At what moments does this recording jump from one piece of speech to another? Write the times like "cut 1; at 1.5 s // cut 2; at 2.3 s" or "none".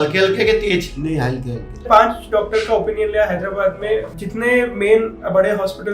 cut 1; at 1.8 s // cut 2; at 4.1 s